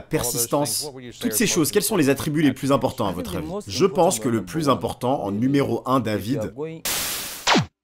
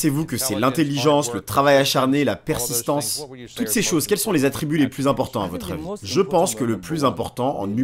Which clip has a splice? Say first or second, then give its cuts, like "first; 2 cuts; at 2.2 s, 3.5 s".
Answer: first; 1 cut; at 6.7 s